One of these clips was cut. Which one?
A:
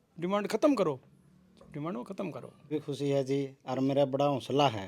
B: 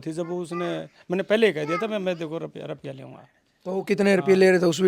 A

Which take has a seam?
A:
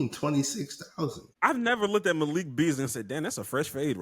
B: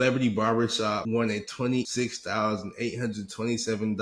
B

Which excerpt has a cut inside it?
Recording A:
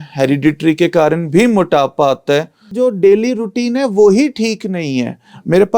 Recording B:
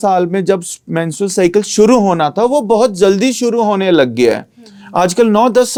A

